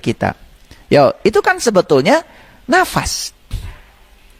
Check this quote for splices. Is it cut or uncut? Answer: uncut